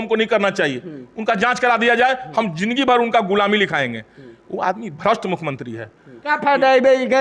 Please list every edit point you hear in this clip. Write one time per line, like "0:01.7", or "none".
0:06.2

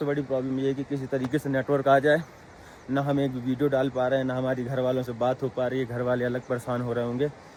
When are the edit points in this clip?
none

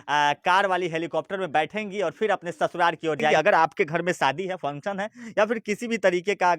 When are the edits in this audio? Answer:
0:03.3

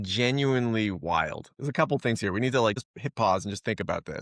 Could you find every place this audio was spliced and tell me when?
0:02.9

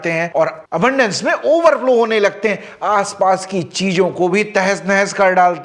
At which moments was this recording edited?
none

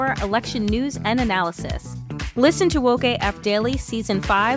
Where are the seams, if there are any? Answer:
none

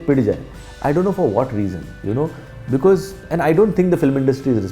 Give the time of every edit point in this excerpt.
0:03.2

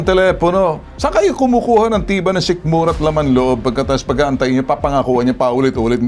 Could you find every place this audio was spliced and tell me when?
0:01.0

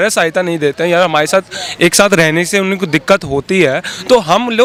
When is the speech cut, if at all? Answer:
none

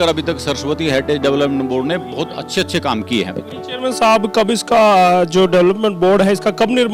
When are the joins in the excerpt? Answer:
none

